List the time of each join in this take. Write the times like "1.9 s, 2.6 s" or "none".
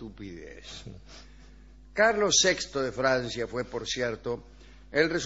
none